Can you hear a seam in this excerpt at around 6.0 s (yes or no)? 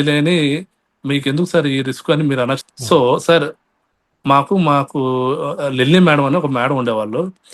no